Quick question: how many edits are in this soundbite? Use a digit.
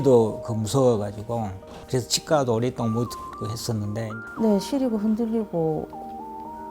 1